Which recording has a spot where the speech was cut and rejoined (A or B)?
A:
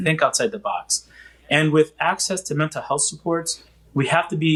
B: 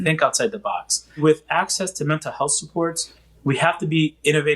B